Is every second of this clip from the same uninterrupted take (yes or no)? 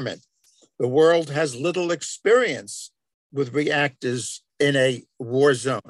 no